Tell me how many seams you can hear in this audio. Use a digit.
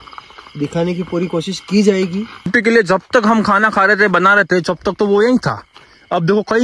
1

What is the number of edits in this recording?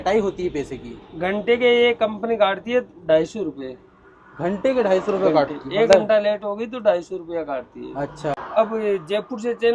0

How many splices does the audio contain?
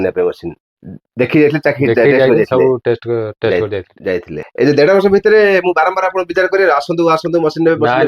1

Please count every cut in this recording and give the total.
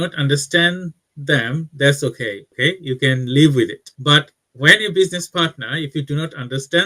1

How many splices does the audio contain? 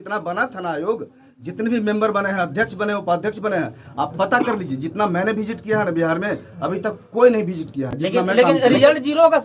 0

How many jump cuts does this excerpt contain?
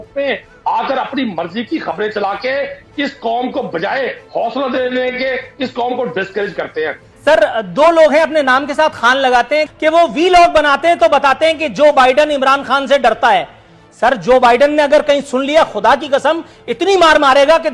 2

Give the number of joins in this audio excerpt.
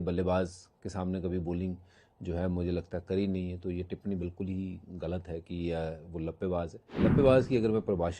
1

